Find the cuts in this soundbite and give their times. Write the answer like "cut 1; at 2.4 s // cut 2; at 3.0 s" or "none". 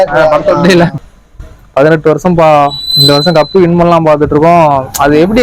cut 1; at 1.0 s